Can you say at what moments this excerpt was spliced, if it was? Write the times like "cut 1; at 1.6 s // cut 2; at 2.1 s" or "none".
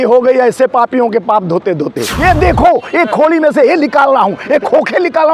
cut 1; at 2.0 s